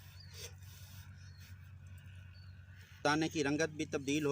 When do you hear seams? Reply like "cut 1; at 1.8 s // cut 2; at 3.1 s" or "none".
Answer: cut 1; at 3.0 s